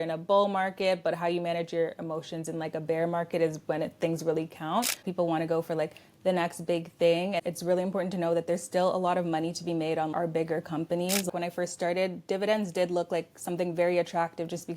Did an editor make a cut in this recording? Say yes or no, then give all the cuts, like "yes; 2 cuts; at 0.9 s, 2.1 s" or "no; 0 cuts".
yes; 3 cuts; at 5.1 s, 7.4 s, 11.3 s